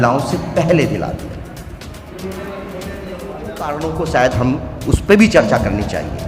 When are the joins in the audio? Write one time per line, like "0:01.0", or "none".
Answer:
0:03.7